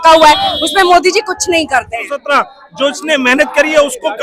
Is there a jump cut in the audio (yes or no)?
yes